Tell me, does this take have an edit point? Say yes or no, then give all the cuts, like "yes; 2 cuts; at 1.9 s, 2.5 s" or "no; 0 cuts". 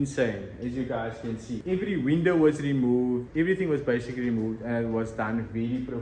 no; 0 cuts